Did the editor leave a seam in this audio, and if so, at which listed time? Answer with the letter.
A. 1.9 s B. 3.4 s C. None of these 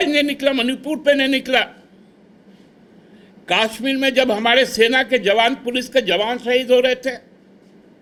C